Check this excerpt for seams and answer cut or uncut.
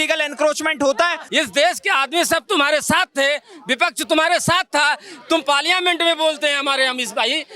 cut